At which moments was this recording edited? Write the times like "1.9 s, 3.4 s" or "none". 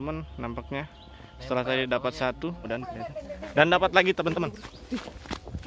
2.6 s